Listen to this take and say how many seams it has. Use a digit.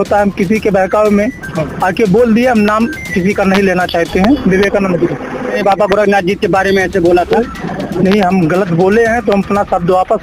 3